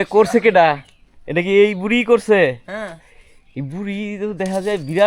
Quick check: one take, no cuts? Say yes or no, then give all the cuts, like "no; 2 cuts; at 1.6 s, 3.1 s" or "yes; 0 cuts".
yes; 0 cuts